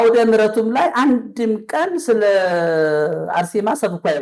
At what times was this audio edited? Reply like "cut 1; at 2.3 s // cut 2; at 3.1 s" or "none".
none